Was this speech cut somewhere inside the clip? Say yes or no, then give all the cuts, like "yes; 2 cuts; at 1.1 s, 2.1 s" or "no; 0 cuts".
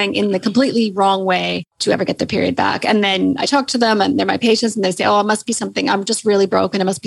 yes; 1 cut; at 1.7 s